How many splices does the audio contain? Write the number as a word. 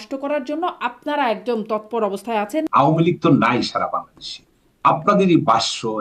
one